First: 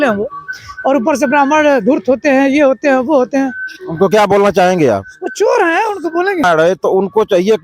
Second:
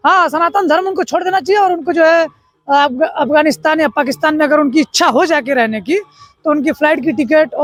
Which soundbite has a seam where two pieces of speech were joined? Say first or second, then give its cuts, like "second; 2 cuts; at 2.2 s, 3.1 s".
first; 1 cut; at 6.4 s